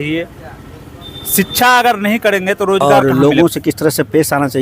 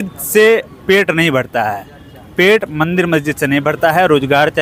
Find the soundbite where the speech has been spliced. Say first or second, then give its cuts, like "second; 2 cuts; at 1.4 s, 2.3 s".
first; 1 cut; at 2.8 s